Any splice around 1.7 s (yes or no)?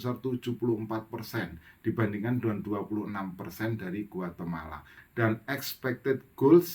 no